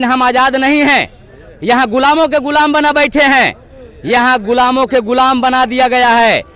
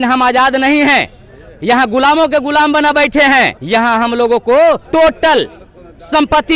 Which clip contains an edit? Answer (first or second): second